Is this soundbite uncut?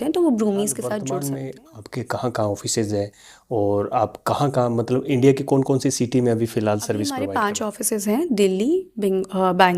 no; 2 cuts; at 1.0 s, 7.3 s

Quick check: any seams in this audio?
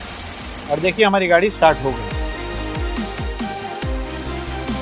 no; 0 cuts

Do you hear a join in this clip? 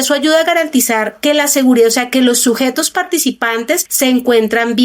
yes; 1 cut; at 1.1 s

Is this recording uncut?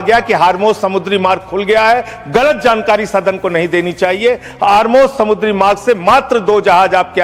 yes; 0 cuts

